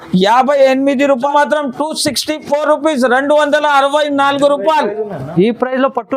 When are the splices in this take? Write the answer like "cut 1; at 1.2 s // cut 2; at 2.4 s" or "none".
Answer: cut 1; at 1.3 s